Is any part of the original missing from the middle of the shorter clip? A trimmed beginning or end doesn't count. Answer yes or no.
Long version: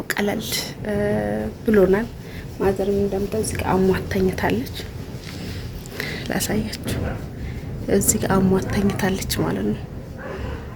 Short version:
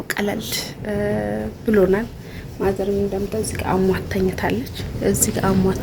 yes